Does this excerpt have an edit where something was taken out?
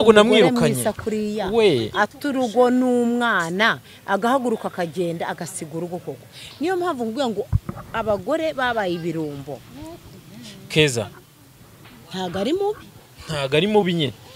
yes; 1 cut; at 11.2 s

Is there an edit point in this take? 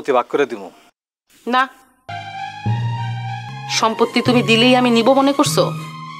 yes; 2 cuts; at 2.0 s, 3.5 s

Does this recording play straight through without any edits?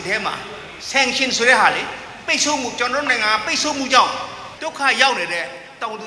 yes; 0 cuts

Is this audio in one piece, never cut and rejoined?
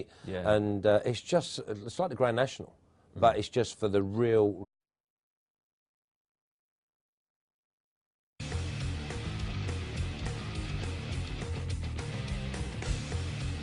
yes; 0 cuts

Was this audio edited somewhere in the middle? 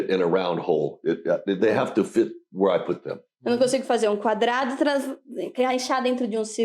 no; 0 cuts

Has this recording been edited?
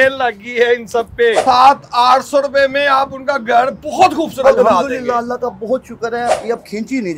yes; 2 cuts; at 1.4 s, 6.4 s

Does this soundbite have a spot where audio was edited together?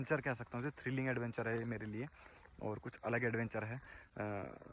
no; 0 cuts

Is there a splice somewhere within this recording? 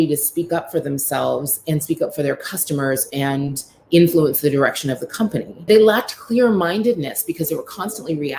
yes; 1 cut; at 5.7 s

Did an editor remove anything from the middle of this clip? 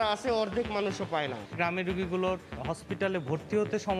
yes; 1 cut; at 1.4 s

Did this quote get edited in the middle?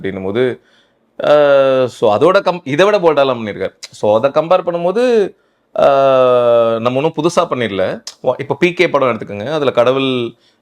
yes; 1 cut; at 8.1 s

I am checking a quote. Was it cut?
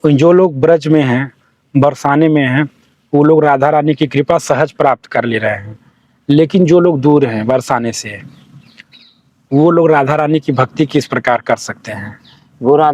no; 0 cuts

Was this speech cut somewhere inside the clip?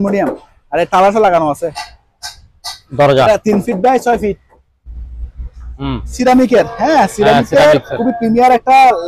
yes; 1 cut; at 6.1 s

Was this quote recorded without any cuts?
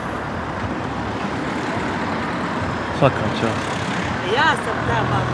yes; 0 cuts

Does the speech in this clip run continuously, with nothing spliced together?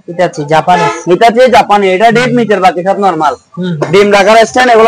yes; 0 cuts

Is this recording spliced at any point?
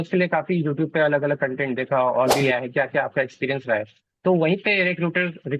yes; 1 cut; at 2.4 s

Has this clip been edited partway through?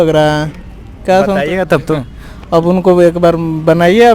no; 0 cuts

